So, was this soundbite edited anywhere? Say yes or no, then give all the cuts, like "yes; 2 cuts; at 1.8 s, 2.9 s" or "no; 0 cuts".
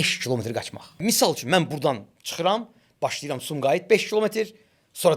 yes; 1 cut; at 1.0 s